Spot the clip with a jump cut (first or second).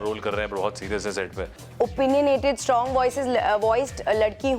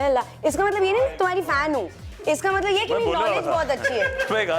first